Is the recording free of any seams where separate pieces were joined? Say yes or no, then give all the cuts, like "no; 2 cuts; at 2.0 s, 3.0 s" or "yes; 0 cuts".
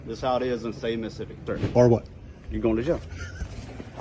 no; 1 cut; at 1.6 s